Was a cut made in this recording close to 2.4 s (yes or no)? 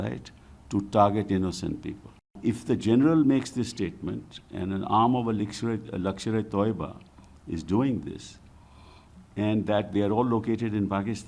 yes